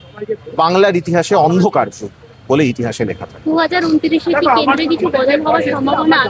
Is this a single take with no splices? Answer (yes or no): yes